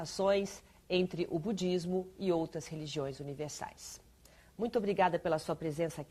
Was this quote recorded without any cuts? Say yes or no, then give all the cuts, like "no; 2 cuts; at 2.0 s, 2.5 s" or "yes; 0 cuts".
no; 1 cut; at 4.0 s